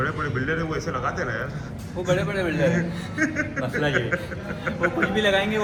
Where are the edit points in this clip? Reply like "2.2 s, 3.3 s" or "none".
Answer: none